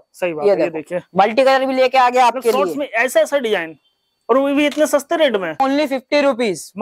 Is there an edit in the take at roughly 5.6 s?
yes; 1 cut; at 5.6 s

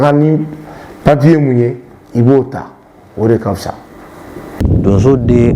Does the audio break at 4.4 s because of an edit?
yes; 1 cut; at 4.4 s

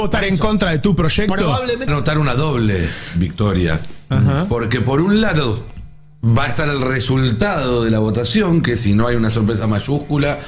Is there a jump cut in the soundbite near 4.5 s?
no; 1 cut; at 1.9 s

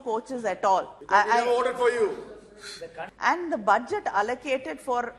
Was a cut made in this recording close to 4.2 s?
no; 2 cuts; at 1.0 s, 3.0 s

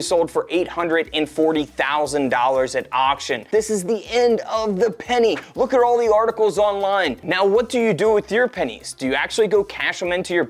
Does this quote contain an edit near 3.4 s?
yes; 2 cuts; at 3.4 s, 7.2 s

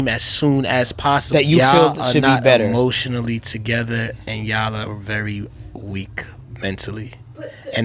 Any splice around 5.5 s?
no; 1 cut; at 1.2 s

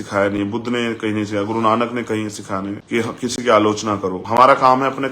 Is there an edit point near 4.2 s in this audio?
yes; 2 cuts; at 2.8 s, 4.2 s

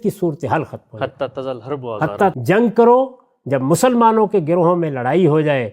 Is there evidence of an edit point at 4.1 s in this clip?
no; 1 cut; at 2.3 s

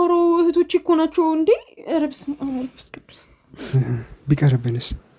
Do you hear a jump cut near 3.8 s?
yes; 1 cut; at 3.8 s

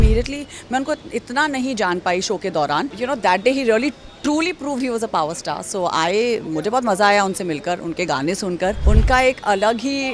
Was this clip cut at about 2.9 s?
yes; 2 cuts; at 2.9 s, 8.8 s

